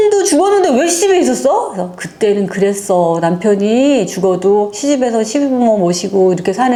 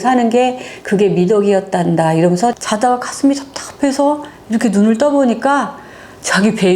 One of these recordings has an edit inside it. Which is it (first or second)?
second